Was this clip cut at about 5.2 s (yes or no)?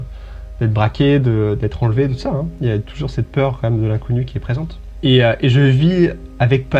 yes